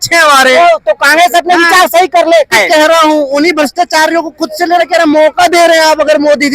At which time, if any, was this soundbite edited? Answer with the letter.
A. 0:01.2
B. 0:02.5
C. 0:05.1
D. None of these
B